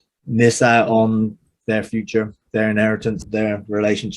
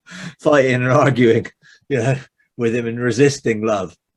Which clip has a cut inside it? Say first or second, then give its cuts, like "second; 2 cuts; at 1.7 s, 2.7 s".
first; 2 cuts; at 1.5 s, 3.2 s